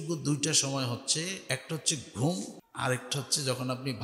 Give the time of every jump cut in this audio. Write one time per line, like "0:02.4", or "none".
0:01.4
0:02.6